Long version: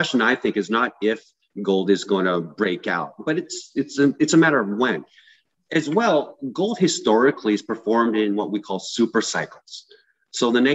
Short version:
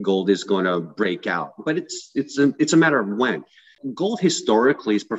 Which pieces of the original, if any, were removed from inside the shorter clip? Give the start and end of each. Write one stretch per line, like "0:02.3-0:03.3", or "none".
0:05.4-0:06.4